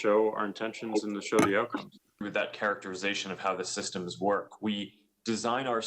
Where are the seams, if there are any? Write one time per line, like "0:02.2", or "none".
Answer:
0:02.2